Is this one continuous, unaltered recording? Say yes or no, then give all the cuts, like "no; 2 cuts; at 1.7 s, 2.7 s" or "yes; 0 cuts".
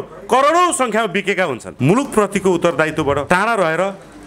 no; 2 cuts; at 1.6 s, 3.2 s